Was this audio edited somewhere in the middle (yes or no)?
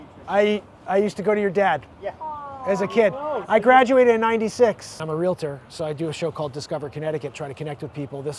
yes